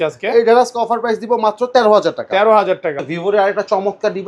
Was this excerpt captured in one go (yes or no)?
no